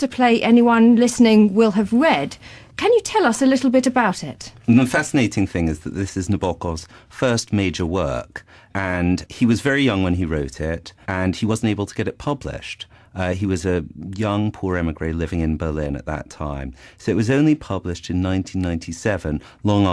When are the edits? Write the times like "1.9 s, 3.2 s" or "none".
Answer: 1.1 s